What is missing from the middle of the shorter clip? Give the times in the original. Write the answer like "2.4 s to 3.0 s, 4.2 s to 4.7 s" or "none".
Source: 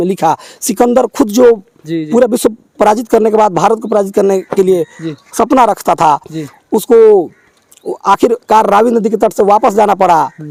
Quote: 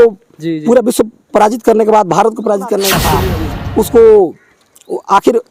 4.6 s to 6.1 s